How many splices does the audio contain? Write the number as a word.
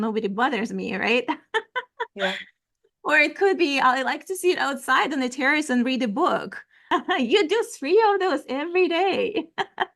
one